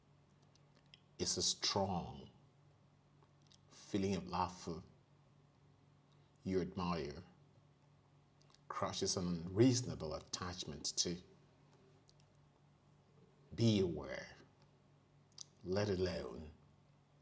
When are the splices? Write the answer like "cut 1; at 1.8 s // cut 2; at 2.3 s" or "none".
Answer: cut 1; at 12.0 s